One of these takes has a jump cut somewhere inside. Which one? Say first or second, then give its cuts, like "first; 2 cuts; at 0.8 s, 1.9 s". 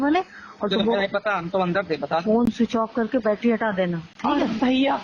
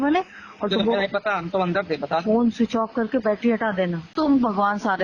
second; 1 cut; at 4.1 s